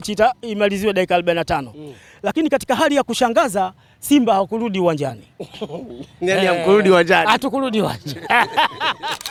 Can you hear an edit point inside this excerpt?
no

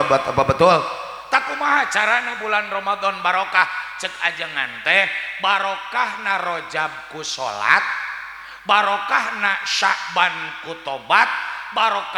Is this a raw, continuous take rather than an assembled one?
yes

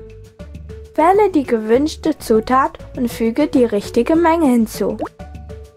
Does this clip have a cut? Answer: yes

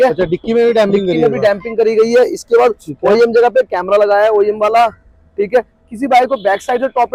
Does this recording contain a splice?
no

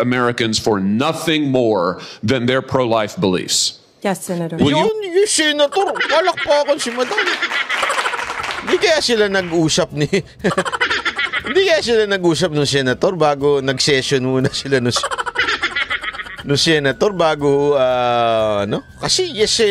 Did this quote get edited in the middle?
no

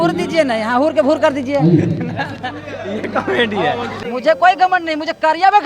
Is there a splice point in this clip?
yes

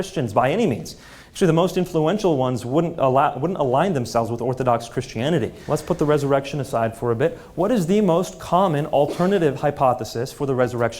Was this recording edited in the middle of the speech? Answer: yes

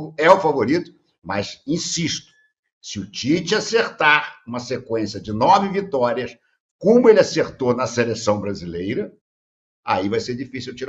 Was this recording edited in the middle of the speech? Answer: no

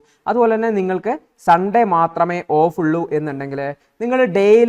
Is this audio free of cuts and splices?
yes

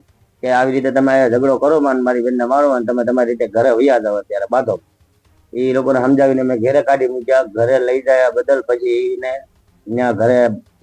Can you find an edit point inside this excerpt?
no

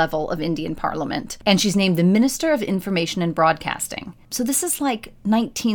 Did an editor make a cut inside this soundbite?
yes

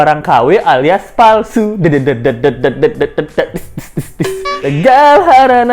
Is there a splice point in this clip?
no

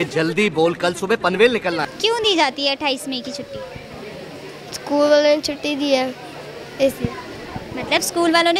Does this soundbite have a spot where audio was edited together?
yes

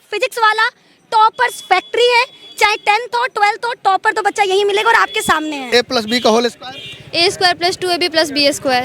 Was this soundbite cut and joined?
yes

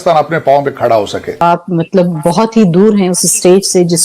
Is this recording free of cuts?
no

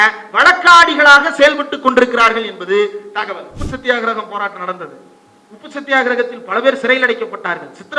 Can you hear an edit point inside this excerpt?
yes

